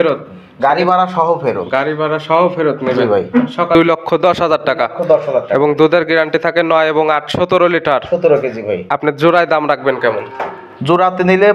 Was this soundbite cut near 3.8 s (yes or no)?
yes